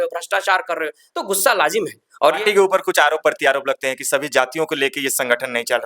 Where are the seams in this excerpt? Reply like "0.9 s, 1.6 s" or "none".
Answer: 2.4 s